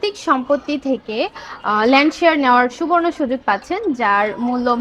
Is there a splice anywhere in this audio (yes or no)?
no